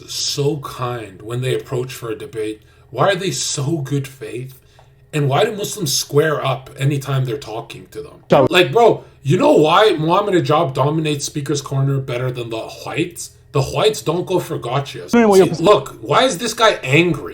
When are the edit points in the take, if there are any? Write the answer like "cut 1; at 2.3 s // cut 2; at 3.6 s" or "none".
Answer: cut 1; at 8.2 s // cut 2; at 15.1 s